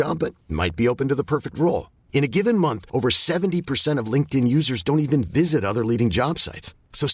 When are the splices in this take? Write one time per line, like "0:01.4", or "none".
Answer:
none

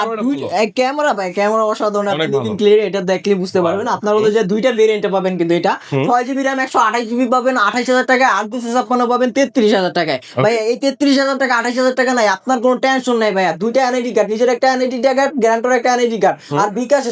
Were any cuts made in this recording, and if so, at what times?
none

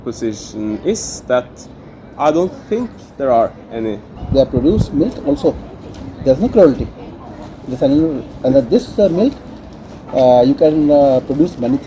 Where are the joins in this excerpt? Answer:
0:04.1

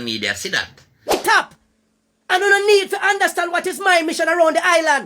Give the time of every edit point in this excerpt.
0:01.1

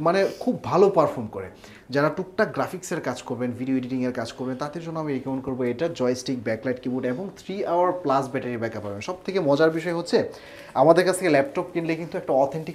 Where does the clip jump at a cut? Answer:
none

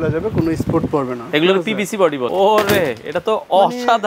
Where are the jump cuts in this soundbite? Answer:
0:02.3

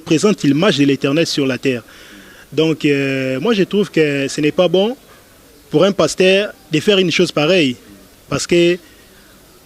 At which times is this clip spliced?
none

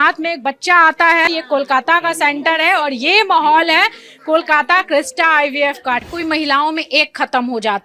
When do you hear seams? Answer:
0:01.3
0:06.1

